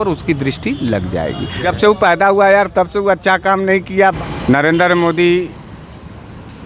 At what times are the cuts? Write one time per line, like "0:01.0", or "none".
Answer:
0:01.6
0:04.2

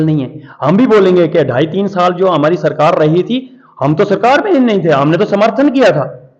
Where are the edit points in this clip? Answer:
none

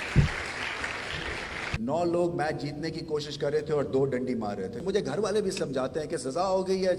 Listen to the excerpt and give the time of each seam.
0:01.6
0:04.8

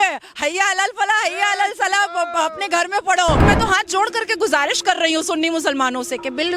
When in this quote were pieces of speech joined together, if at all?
0:03.4

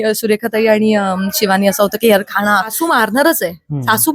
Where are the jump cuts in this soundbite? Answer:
0:02.7

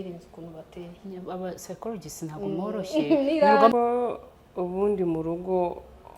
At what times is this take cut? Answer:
0:03.7

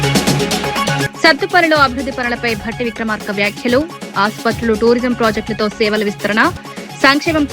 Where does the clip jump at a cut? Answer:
0:01.0

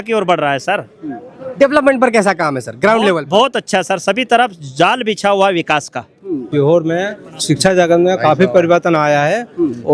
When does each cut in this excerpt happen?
0:06.5

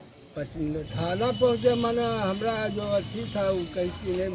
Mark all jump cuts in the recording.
0:00.9

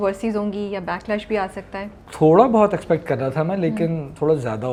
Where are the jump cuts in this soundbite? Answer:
none

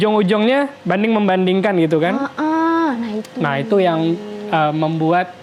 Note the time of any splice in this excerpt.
none

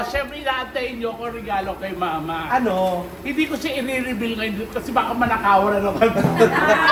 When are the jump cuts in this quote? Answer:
none

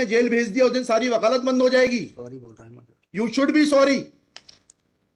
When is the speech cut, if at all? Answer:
none

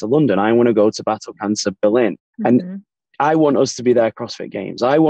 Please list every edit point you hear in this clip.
0:02.3
0:03.2

